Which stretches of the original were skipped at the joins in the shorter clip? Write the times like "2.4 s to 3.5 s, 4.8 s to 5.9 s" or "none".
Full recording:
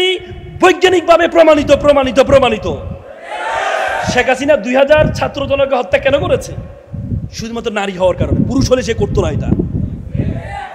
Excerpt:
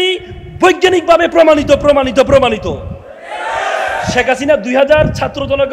none